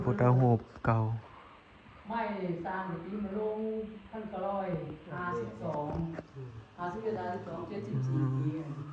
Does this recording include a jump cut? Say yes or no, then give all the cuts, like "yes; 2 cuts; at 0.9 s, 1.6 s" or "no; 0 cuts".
no; 0 cuts